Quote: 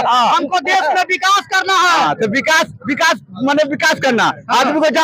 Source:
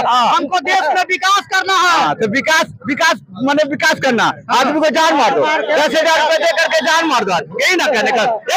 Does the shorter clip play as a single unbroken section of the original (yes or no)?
yes